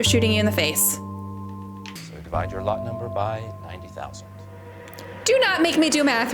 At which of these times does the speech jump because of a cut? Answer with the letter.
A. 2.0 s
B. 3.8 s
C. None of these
A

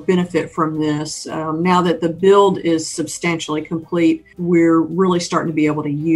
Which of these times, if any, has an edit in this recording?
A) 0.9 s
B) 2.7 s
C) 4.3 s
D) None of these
C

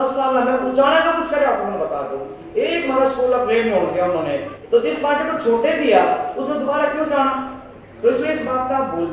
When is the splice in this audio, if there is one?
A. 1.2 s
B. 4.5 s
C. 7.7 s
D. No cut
B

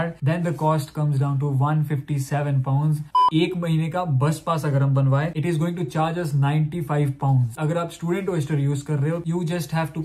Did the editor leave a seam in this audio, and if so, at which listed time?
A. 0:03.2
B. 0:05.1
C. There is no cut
A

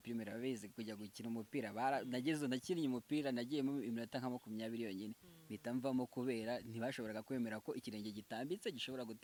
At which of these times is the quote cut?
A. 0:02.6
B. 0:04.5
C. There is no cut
C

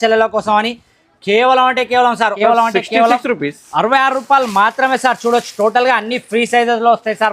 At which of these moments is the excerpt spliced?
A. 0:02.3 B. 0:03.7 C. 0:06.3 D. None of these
A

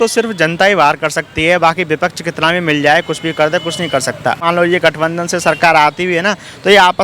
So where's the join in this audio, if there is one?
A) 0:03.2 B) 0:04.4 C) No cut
B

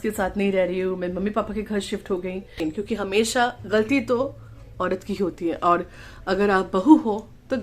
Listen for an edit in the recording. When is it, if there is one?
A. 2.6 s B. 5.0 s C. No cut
A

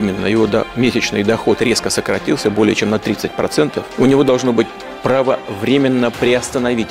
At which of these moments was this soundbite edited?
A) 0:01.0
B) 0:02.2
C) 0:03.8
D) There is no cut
C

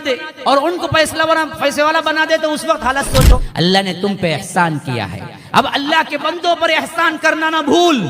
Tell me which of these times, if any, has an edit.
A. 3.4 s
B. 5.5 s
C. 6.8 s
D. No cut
A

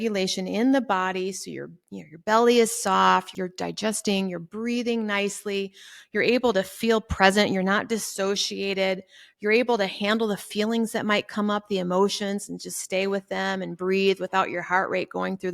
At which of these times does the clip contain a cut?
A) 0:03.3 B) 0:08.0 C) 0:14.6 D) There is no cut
A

